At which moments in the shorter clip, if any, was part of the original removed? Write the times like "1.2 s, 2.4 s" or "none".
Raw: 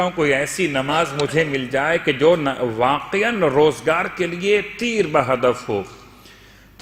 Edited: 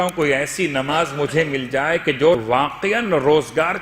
2.4 s